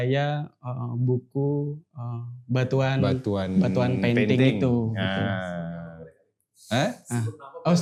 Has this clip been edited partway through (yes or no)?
no